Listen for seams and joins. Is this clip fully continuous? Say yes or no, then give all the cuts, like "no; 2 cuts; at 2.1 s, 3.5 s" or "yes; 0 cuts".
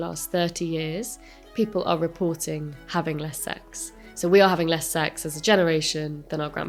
yes; 0 cuts